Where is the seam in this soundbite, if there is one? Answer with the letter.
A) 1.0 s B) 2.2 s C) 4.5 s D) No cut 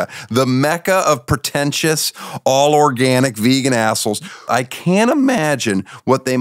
C